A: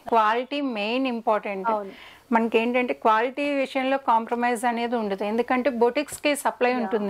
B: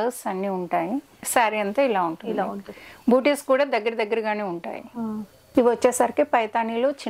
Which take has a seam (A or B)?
B